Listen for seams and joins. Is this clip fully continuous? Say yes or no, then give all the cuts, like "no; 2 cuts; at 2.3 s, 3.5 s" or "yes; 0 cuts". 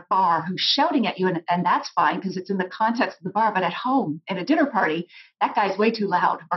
yes; 0 cuts